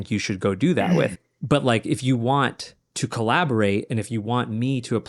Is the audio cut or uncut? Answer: cut